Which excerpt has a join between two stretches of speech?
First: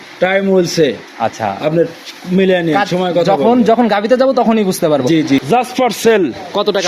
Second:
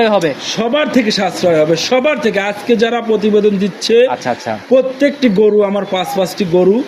first; 1 cut; at 5.4 s

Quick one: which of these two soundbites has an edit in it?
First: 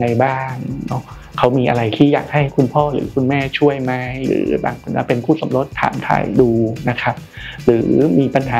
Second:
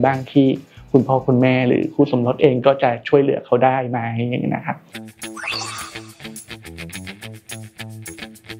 second; 1 cut; at 4.9 s

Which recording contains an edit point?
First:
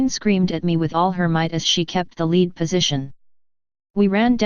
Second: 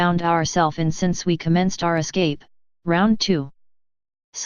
second; 1 cut; at 3.1 s

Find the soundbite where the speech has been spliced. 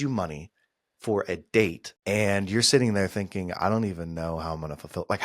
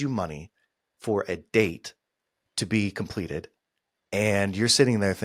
first; 1 cut; at 1.9 s

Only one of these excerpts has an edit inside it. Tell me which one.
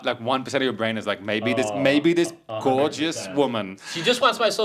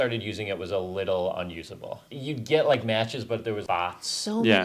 second; 2 cuts; at 2.0 s, 3.6 s

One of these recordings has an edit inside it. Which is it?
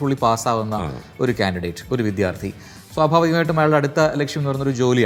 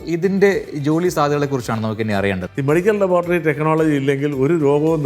second; 1 cut; at 2.4 s

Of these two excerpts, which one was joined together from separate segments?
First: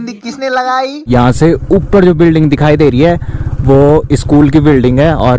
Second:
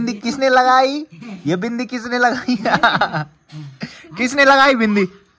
first; 1 cut; at 1.1 s

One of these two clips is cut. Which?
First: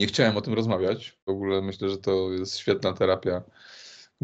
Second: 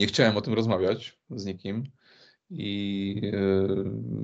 first; 1 cut; at 1.3 s

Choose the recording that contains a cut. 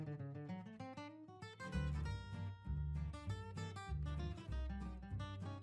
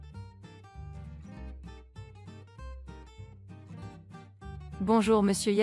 second; 1 cut; at 4.5 s

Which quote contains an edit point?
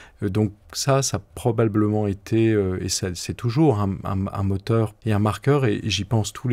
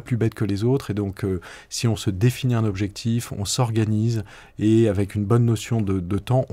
first; 1 cut; at 5.0 s

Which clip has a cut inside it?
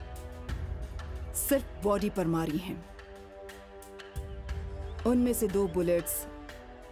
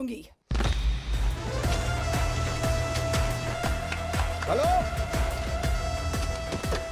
second; 1 cut; at 1.3 s

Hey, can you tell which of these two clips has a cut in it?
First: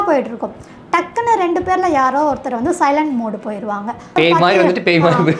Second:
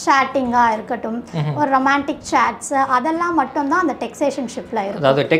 first; 1 cut; at 4.2 s

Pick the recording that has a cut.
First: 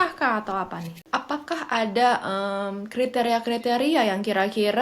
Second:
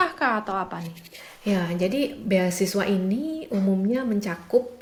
first; 1 cut; at 1.0 s

